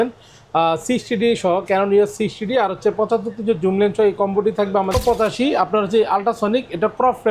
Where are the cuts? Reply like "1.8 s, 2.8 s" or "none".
4.9 s